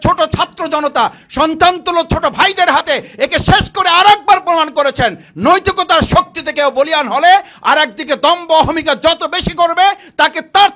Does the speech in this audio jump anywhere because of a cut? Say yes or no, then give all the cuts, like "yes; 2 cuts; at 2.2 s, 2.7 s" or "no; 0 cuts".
no; 0 cuts